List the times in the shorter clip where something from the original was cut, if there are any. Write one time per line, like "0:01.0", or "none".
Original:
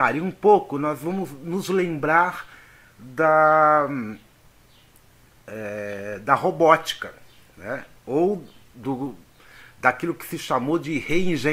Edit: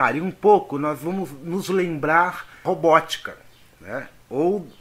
0:02.6